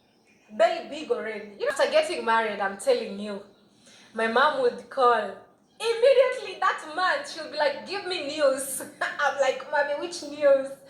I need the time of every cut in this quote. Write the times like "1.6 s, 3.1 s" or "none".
1.7 s